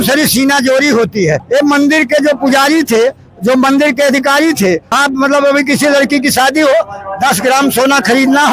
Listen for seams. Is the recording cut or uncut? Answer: cut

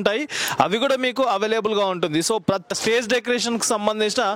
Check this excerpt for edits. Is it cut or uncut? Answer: cut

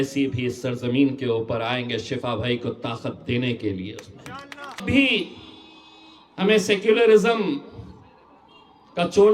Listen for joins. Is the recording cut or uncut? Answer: cut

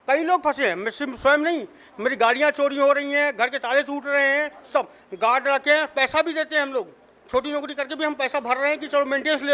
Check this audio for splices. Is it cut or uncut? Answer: uncut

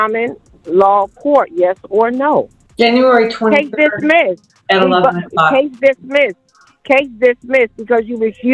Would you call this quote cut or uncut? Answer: uncut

